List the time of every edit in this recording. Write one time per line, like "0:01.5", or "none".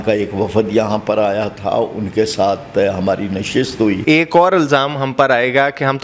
0:04.0